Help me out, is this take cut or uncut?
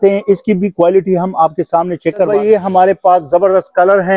cut